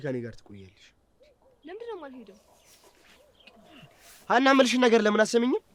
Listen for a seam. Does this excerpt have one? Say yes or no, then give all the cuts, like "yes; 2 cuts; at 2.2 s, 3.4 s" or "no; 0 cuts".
no; 0 cuts